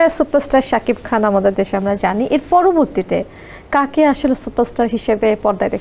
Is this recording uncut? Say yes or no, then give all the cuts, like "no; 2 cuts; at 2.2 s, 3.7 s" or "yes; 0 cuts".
yes; 0 cuts